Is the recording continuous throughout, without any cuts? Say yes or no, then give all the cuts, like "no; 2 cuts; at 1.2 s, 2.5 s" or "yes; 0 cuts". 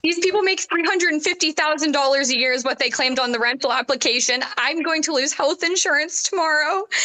yes; 0 cuts